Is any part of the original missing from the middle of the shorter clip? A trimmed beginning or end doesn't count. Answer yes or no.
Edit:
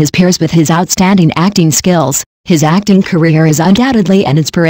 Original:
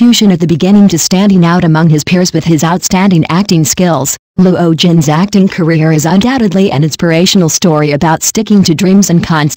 yes